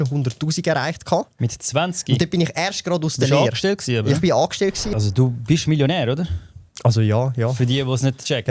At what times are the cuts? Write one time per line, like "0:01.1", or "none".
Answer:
0:04.9